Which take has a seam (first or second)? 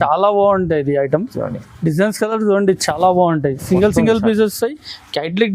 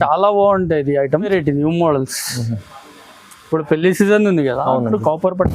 second